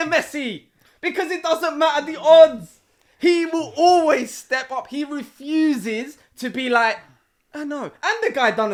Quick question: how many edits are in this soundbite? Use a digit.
0